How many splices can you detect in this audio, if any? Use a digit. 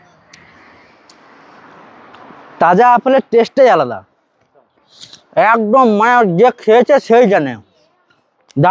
0